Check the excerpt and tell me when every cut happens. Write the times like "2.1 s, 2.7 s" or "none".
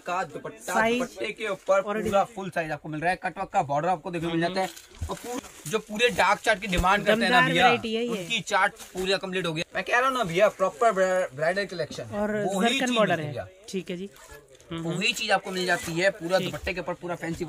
5.3 s, 9.6 s